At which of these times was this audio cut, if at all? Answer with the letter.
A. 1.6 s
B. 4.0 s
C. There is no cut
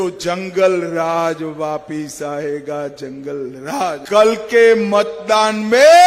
B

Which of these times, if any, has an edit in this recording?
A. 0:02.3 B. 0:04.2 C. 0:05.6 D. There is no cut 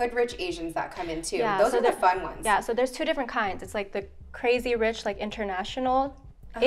D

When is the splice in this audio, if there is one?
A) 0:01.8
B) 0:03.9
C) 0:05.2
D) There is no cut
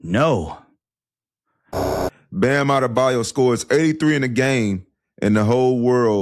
A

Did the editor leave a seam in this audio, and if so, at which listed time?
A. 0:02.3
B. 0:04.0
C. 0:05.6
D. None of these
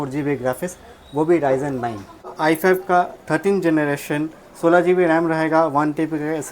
A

